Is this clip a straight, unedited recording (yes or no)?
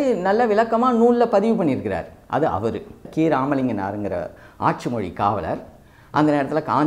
no